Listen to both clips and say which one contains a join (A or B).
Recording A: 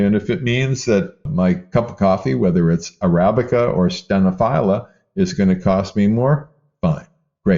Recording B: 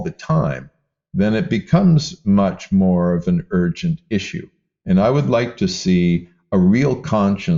A